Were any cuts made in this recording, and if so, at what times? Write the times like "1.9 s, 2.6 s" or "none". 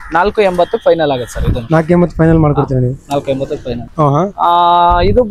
3.9 s